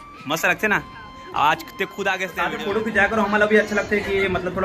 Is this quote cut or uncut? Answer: cut